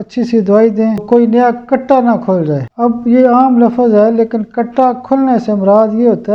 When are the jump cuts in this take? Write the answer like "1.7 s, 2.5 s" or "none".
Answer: 1.0 s, 2.7 s